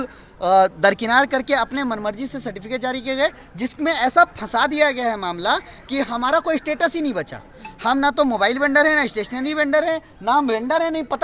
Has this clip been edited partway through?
no; 0 cuts

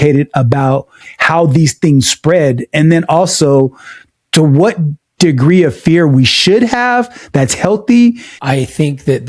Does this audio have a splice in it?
yes; 1 cut; at 8.3 s

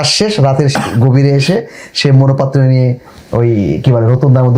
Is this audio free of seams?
yes; 0 cuts

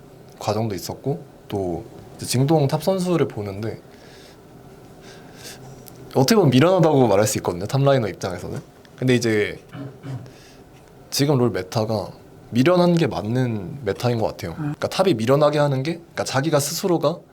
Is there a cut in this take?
yes; 1 cut; at 14.7 s

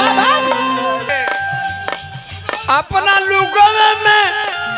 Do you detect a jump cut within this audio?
yes; 1 cut; at 1.1 s

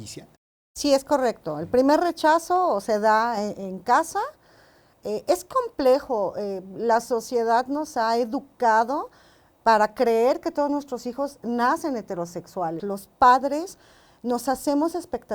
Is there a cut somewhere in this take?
yes; 1 cut; at 12.8 s

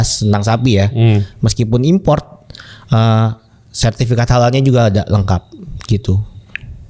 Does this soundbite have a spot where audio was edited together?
no; 0 cuts

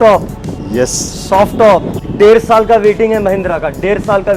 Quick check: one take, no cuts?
no; 1 cut; at 2.0 s

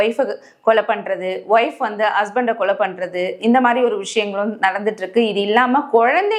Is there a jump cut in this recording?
no; 0 cuts

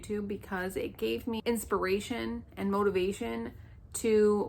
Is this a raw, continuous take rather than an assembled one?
no; 1 cut; at 1.4 s

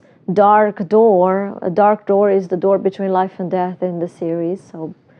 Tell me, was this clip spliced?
no; 0 cuts

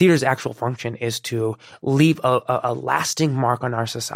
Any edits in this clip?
no; 0 cuts

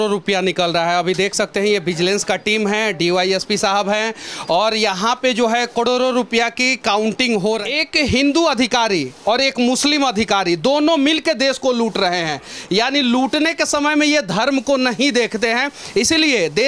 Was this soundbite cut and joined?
yes; 1 cut; at 7.6 s

